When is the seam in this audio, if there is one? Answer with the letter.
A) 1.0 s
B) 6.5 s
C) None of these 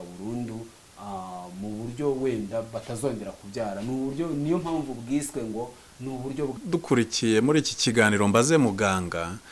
B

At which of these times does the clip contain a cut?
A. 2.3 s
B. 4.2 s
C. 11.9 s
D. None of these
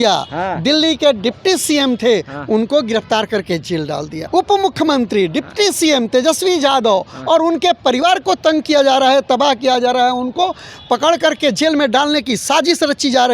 B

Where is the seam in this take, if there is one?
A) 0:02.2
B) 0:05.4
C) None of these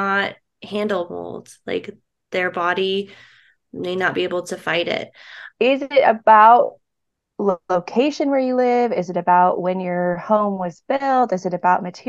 B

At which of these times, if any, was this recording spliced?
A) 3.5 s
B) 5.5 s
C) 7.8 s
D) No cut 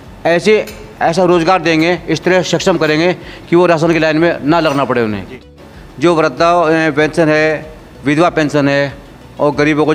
B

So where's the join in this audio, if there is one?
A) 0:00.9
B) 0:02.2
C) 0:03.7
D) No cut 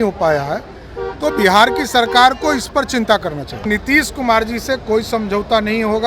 C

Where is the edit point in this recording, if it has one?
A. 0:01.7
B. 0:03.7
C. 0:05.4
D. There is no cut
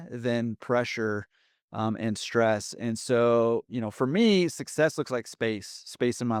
D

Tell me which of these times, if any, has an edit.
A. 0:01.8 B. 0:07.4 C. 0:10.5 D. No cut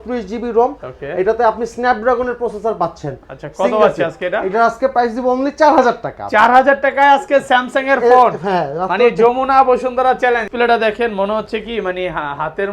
C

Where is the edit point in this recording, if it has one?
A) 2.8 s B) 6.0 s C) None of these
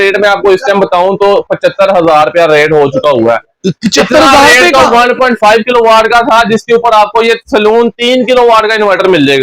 C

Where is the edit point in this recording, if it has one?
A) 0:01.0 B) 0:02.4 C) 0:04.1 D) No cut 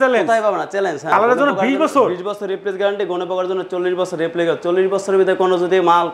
A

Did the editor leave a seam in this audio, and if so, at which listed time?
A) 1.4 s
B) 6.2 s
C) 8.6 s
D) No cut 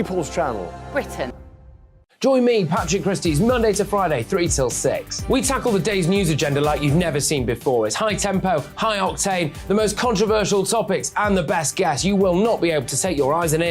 A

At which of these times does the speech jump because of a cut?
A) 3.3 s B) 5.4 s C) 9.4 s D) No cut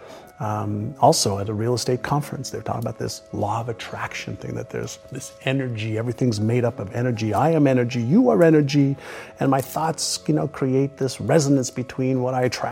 D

